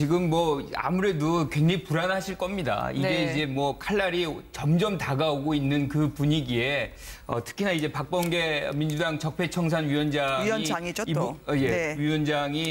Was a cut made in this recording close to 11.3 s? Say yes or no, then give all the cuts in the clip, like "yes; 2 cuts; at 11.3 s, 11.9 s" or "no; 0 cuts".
no; 1 cut; at 6.4 s